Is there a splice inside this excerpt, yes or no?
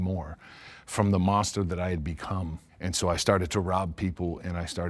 yes